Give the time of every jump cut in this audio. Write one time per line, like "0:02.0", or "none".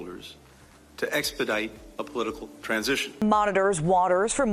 0:03.1